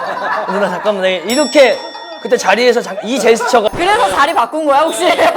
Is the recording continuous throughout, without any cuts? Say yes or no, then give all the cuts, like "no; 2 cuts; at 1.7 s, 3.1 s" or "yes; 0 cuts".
yes; 0 cuts